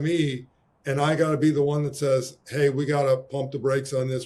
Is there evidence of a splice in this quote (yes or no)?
no